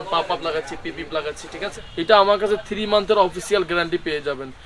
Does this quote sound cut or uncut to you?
cut